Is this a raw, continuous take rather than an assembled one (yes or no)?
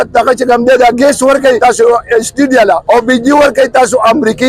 no